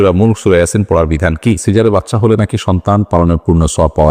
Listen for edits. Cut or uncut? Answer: cut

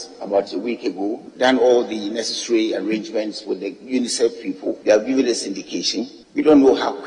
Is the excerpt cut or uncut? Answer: cut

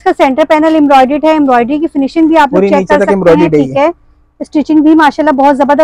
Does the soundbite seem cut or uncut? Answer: uncut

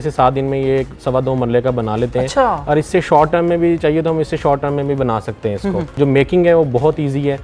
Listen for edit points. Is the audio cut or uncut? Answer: uncut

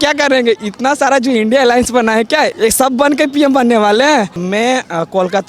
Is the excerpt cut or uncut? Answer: cut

